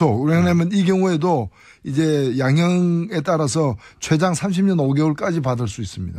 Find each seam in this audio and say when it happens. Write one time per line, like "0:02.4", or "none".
0:05.3